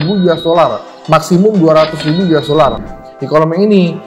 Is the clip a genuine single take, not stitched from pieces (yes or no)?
no